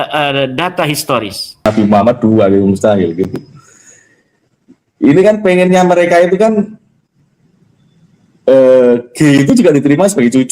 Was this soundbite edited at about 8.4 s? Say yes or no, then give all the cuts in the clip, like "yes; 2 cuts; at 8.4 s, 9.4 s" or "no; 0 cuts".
no; 1 cut; at 1.7 s